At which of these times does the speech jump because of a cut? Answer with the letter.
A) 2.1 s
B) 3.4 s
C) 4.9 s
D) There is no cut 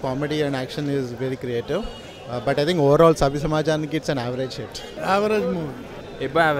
C